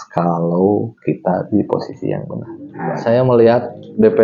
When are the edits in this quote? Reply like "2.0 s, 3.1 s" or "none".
2.7 s